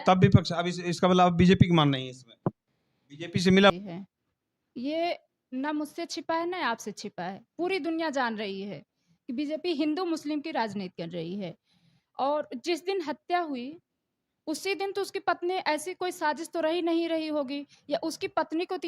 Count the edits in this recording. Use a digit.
1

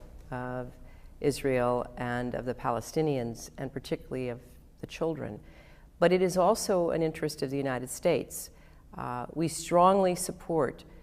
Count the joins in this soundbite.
0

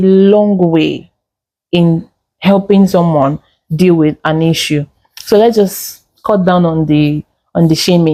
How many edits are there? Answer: 0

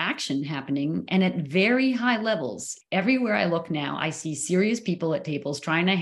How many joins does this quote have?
1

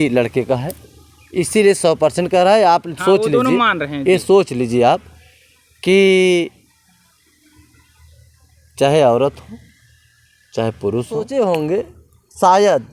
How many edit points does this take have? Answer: 1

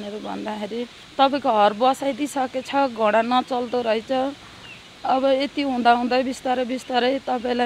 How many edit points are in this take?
1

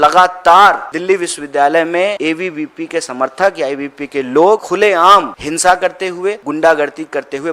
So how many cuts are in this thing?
4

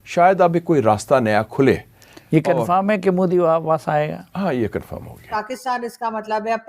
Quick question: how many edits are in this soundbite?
1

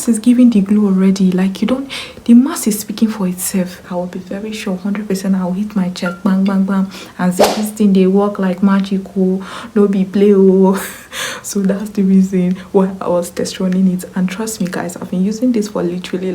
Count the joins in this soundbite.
1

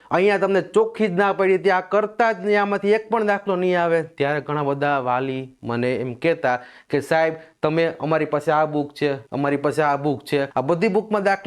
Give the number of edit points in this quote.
2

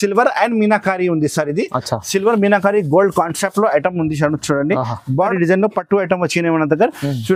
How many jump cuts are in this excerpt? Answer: 1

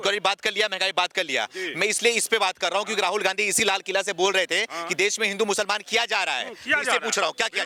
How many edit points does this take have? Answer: 0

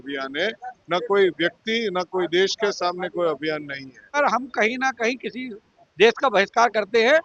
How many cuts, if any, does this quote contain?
1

